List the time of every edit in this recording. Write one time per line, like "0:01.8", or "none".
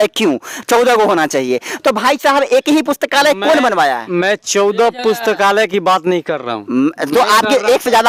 none